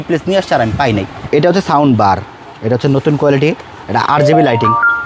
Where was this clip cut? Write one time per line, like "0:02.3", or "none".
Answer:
0:01.2